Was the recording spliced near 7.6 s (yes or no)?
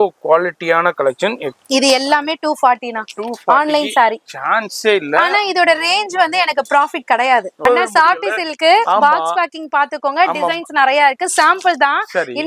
yes